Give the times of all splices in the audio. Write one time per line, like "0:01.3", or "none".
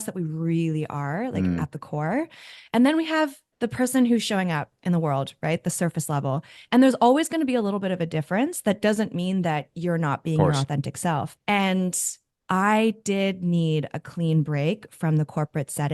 0:11.4
0:12.3